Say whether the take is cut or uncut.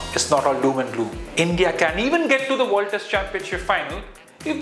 cut